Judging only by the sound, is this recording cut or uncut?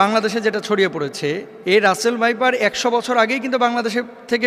cut